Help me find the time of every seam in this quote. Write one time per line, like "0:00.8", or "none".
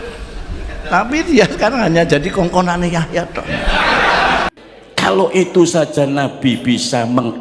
0:04.5